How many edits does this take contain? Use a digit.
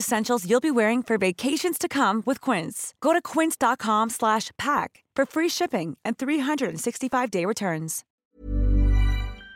1